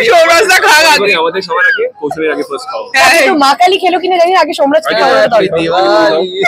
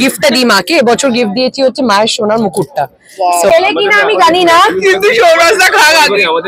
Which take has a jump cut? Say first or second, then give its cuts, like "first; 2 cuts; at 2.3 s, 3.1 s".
second; 1 cut; at 3.5 s